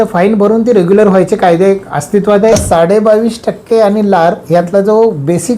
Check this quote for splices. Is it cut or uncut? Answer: cut